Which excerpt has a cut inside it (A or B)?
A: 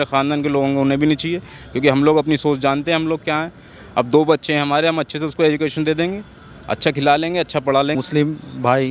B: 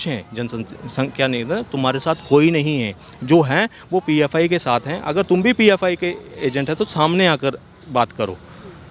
A